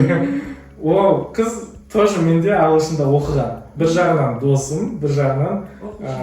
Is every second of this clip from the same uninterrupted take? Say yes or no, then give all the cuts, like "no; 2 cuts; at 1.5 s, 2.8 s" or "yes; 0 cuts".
yes; 0 cuts